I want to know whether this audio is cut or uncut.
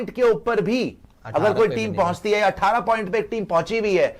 uncut